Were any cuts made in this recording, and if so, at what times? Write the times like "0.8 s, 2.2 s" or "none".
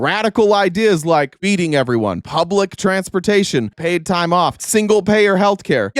2.2 s, 3.7 s, 4.6 s

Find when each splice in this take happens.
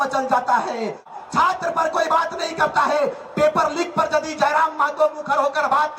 1.1 s

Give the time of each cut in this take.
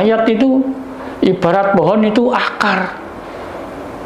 none

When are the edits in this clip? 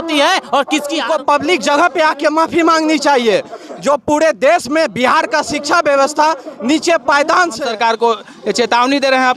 1.0 s, 7.6 s

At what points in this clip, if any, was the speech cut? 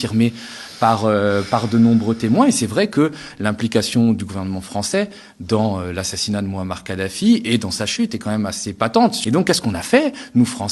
9.2 s

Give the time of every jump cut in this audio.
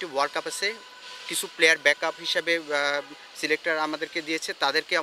none

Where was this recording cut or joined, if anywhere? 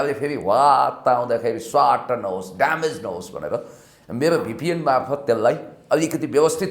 none

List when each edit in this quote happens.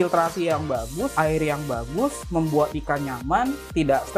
1.1 s

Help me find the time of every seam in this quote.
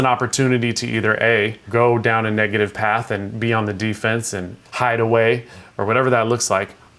1.6 s, 4.5 s, 5.6 s

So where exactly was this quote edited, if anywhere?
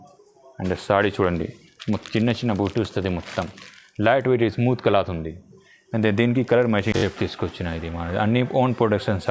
7.0 s

